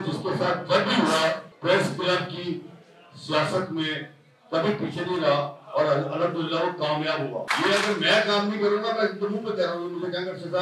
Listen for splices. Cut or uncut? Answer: cut